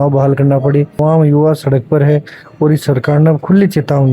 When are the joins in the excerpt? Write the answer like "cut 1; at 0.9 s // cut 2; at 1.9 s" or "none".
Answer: cut 1; at 1.0 s